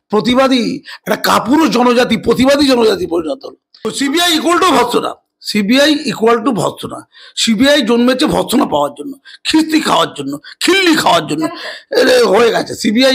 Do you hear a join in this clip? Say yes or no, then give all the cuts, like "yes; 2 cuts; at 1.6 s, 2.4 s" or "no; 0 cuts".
yes; 1 cut; at 3.9 s